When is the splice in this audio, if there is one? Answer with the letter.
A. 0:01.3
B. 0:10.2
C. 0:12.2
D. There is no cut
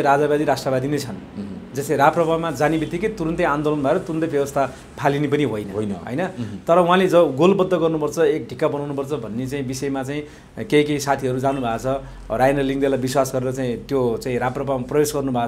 D